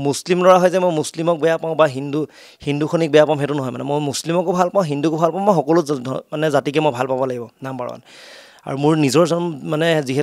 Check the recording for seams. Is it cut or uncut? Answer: uncut